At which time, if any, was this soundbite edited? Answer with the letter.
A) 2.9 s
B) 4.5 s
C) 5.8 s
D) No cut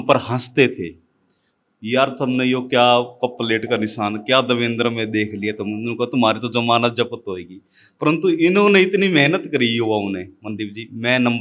D